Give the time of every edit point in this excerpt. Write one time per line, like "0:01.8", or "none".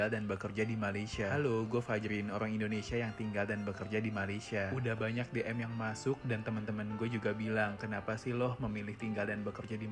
none